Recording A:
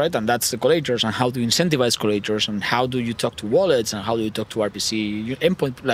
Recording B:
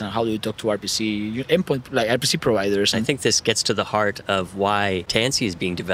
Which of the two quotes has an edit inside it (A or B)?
B